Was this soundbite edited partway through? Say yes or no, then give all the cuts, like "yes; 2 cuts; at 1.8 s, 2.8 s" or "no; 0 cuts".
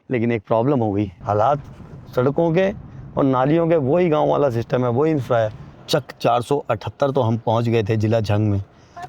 yes; 2 cuts; at 1.2 s, 5.7 s